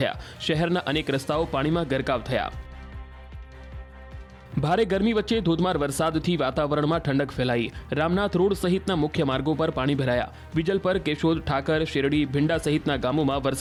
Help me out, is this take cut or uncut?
uncut